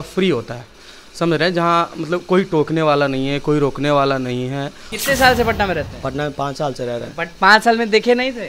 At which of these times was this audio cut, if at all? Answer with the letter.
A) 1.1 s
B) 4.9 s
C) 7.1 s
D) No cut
B